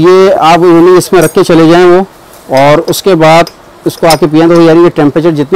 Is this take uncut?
yes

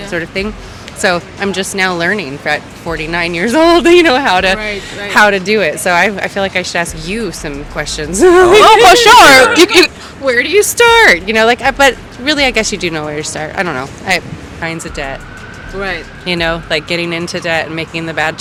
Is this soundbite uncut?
yes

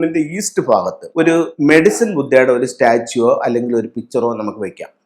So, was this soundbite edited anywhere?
yes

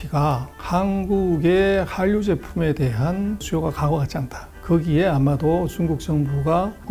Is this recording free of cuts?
yes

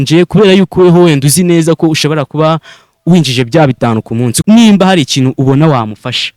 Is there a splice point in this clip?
yes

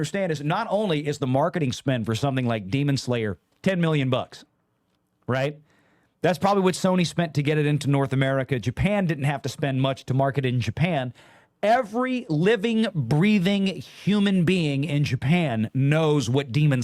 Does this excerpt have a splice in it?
no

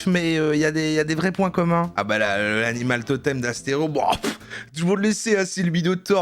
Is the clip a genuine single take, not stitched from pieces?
no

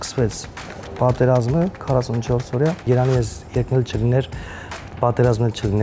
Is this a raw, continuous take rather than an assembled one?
no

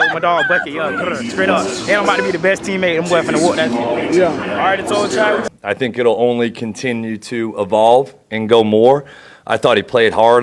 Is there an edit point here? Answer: yes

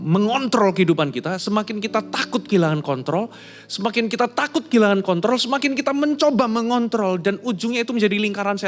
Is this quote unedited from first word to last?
yes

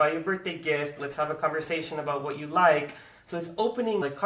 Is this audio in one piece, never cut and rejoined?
yes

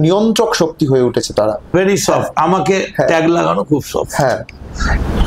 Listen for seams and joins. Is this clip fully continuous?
no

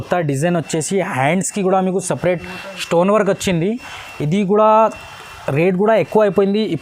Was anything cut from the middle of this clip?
no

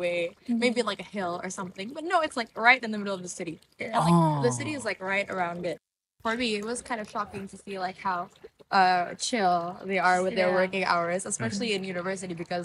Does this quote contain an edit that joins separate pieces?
yes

